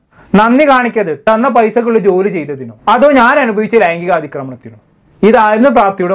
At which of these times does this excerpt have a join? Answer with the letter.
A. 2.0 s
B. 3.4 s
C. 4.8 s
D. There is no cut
D